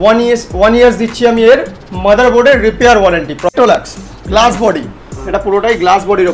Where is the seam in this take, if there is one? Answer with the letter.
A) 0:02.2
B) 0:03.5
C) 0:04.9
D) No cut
B